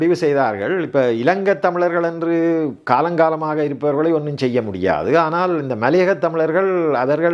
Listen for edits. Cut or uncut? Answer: uncut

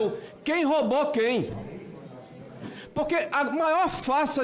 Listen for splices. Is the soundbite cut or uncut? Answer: uncut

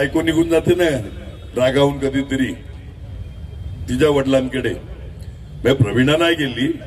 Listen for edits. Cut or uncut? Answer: uncut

